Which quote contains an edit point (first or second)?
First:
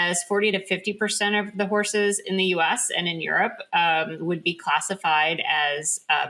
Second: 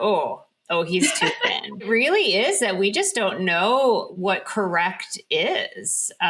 second